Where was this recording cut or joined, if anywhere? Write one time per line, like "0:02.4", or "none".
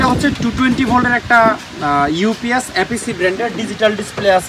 none